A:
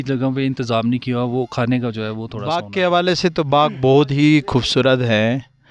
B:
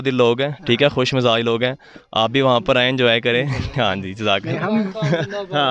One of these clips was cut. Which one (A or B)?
A